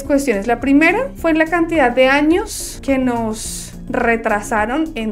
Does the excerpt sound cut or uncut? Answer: uncut